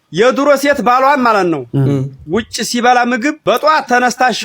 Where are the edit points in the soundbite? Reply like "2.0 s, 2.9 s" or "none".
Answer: 3.4 s